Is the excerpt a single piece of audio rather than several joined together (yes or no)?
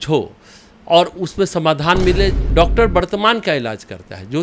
no